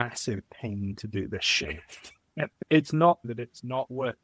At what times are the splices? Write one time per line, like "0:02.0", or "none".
0:02.6
0:03.2